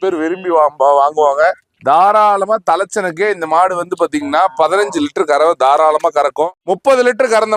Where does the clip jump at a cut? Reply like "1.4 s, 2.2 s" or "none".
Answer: 6.6 s